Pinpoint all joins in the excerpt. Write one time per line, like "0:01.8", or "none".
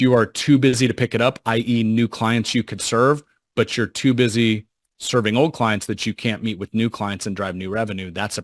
none